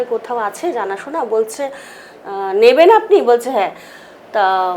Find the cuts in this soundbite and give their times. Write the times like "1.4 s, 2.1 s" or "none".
none